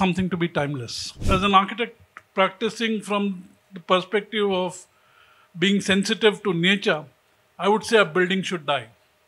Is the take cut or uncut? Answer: cut